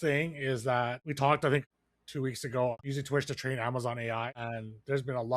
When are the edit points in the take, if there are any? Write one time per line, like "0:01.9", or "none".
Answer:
0:01.0
0:01.6
0:02.7
0:04.4

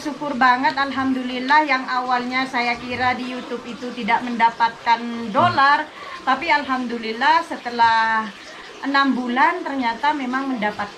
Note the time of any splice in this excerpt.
none

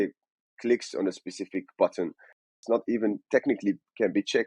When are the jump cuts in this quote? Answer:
0:02.5

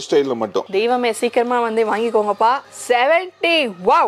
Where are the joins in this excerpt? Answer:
0:02.7

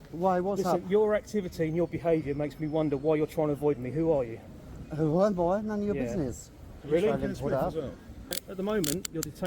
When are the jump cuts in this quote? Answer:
0:08.4

